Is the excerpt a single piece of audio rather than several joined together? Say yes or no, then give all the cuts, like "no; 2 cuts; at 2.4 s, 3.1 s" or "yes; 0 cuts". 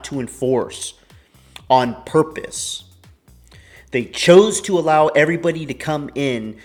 yes; 0 cuts